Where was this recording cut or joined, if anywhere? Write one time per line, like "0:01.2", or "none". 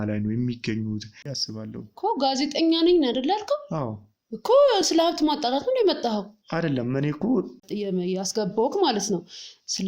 0:01.3
0:07.6